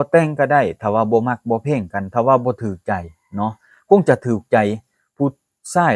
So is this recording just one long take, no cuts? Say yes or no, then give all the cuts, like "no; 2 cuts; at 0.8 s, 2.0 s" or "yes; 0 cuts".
yes; 0 cuts